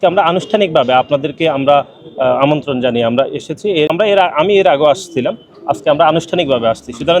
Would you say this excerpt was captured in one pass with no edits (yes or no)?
no